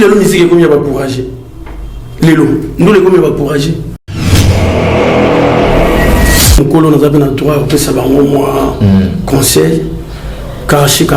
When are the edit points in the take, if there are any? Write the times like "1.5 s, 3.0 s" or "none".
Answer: 4.1 s, 6.4 s